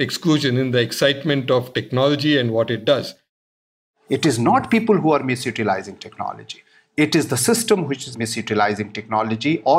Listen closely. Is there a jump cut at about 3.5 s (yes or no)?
yes